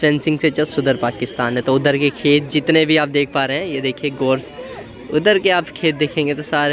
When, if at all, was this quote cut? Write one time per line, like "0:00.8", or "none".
none